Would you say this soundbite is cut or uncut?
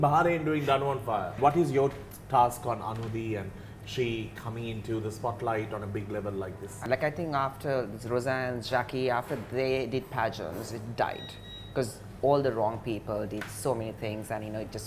cut